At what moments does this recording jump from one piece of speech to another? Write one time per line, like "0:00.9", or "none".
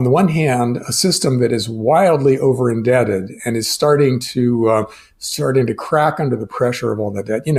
none

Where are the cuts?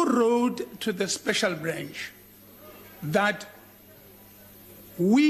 none

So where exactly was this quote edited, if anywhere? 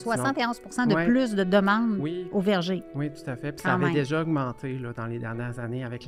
none

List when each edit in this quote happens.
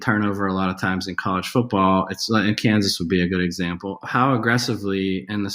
0:04.1

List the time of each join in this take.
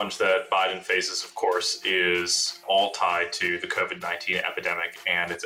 none

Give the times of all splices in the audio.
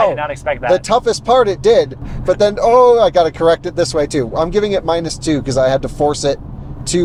none

